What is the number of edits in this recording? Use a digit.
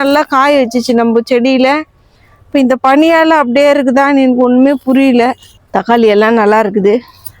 1